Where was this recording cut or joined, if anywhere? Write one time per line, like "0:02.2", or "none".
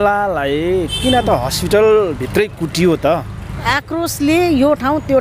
0:03.4